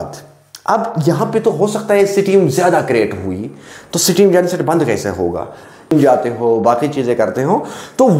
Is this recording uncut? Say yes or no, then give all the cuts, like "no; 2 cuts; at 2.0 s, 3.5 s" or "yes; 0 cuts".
no; 1 cut; at 5.9 s